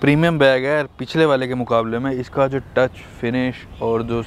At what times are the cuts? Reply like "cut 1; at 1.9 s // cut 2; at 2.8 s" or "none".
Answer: none